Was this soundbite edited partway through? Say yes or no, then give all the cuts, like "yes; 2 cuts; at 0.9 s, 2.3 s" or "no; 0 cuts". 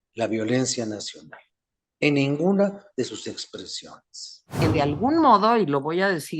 yes; 1 cut; at 4.5 s